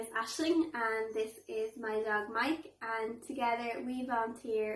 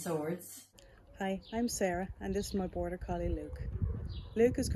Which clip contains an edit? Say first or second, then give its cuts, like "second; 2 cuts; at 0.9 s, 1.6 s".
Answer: second; 1 cut; at 1.0 s